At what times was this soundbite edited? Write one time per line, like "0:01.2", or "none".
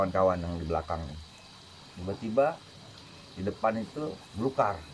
0:01.9